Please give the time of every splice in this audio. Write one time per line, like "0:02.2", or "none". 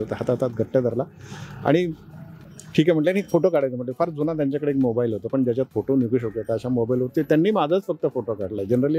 none